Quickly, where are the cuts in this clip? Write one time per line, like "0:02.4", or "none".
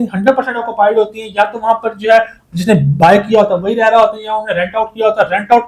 none